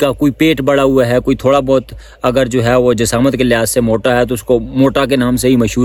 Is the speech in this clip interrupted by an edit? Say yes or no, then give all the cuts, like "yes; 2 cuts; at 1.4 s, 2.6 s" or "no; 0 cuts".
no; 0 cuts